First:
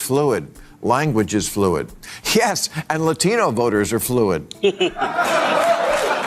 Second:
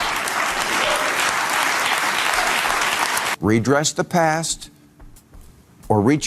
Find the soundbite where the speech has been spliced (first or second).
second